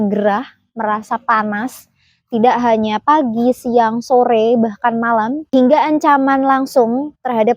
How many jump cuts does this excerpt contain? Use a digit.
1